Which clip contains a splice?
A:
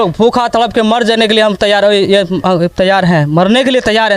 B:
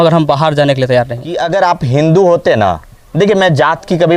B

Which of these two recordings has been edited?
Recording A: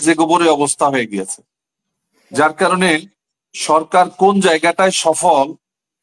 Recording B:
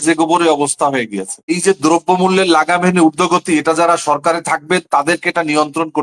B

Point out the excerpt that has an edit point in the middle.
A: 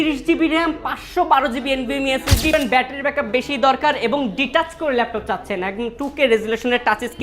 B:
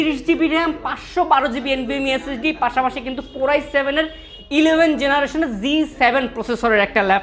A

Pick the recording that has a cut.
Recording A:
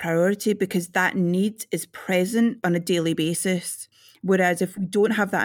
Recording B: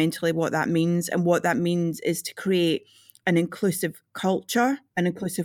A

